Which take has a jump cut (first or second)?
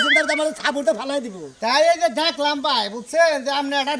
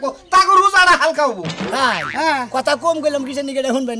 second